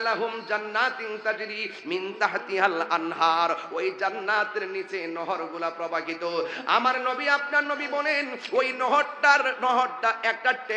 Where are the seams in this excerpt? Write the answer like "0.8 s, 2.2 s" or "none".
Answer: none

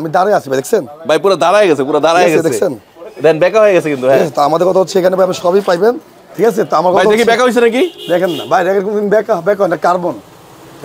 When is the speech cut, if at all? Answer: none

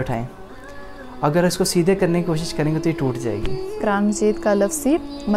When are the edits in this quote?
3.8 s

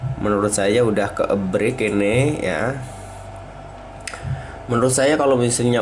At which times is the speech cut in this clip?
none

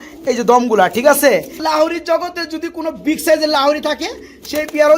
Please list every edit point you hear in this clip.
1.6 s

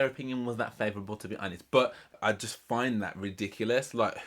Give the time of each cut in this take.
2.1 s

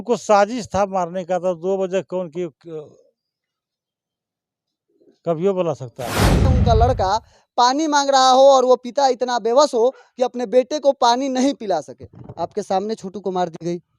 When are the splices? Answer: 6.5 s

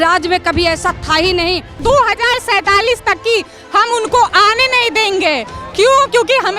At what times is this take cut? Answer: 1.7 s

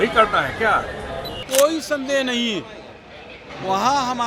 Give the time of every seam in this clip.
1.4 s

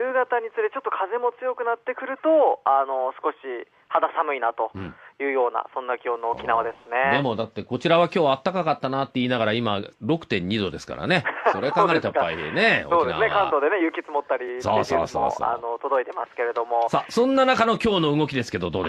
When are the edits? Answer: 13.8 s

